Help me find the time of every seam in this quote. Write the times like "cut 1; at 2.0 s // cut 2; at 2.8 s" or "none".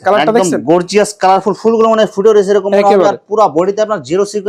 none